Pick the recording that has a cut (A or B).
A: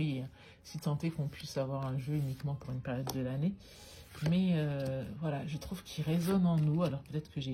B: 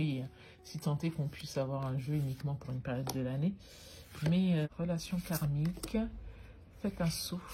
B